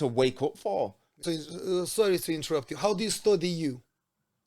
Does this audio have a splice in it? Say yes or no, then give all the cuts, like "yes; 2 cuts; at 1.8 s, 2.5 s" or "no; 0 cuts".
yes; 1 cut; at 1.2 s